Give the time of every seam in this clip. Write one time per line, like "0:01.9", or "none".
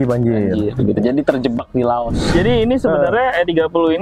0:02.3